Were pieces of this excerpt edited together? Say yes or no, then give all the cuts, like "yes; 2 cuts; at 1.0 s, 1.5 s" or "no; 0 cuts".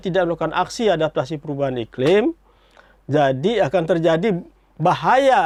no; 0 cuts